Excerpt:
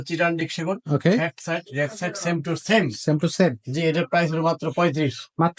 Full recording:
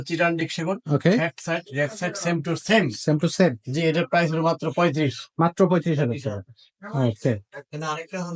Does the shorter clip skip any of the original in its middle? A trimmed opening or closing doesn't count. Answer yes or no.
no